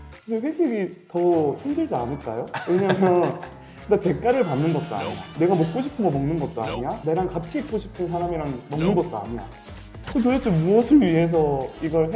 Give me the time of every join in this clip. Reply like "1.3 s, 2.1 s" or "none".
5.3 s, 7.0 s